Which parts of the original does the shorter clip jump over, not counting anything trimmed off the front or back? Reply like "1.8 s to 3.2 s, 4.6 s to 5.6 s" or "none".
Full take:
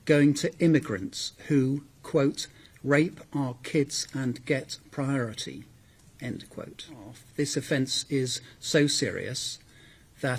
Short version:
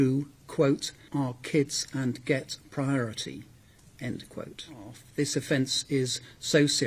2.6 s to 3.2 s